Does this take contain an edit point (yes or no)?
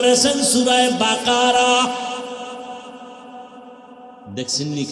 no